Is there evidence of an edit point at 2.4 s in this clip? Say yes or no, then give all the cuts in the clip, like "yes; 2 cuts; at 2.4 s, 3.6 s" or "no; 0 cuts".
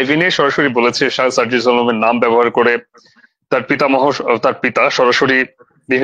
no; 0 cuts